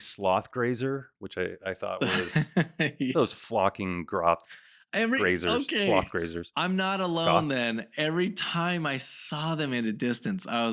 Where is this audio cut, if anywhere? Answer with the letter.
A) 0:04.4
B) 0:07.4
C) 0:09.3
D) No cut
D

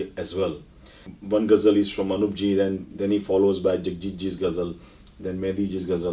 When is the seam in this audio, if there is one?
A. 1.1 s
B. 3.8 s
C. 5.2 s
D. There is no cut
A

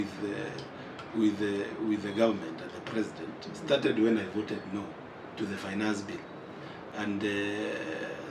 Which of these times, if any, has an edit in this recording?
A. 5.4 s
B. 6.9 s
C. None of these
C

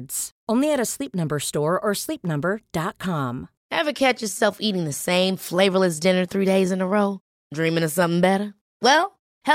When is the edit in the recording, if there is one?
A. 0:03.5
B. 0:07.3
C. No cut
A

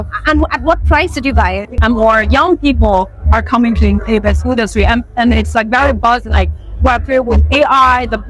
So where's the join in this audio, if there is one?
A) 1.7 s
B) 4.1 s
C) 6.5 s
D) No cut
A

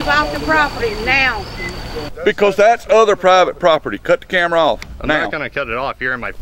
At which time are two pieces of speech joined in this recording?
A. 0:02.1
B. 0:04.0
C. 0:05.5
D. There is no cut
A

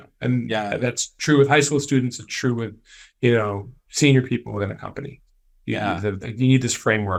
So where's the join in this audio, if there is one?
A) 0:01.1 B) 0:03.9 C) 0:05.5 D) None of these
D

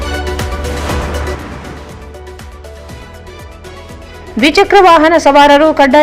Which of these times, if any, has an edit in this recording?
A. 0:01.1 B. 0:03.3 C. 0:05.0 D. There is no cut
A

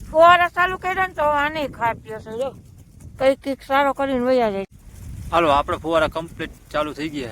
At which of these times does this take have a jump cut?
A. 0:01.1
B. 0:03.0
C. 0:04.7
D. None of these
C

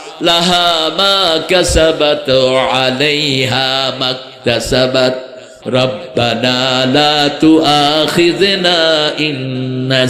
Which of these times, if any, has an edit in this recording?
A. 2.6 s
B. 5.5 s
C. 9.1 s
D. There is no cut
B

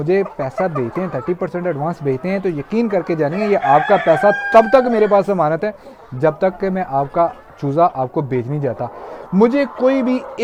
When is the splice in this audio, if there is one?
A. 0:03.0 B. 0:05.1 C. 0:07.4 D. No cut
D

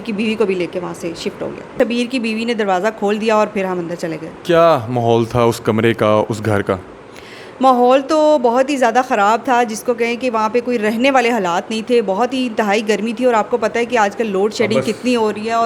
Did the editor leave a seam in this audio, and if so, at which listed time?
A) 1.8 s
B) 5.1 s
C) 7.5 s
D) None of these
A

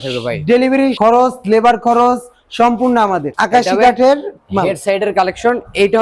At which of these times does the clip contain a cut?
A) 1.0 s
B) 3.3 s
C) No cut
B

